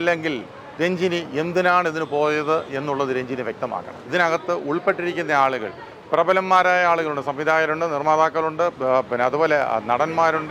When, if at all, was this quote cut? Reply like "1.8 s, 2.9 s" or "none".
4.0 s